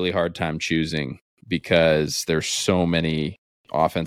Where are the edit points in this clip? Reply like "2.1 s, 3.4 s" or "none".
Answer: none